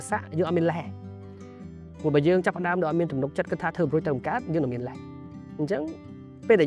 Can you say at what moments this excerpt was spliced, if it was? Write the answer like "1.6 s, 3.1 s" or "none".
none